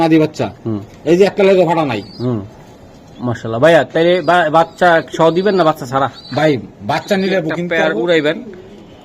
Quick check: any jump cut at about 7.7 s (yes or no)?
yes